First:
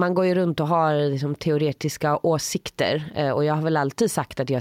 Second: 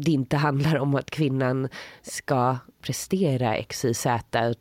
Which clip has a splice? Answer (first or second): second